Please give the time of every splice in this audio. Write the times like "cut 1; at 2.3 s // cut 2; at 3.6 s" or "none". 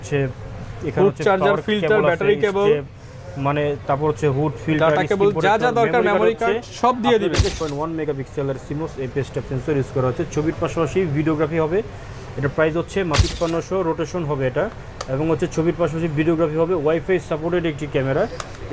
cut 1; at 7.6 s // cut 2; at 13.2 s